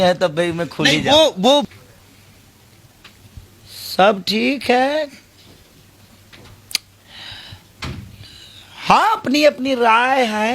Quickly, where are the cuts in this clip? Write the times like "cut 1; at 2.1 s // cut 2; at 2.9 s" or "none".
cut 1; at 1.7 s